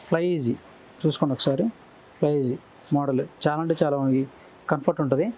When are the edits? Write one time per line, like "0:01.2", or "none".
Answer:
none